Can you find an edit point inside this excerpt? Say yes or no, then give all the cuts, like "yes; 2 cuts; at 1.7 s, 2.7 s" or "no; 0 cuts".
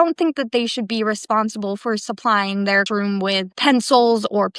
yes; 1 cut; at 2.9 s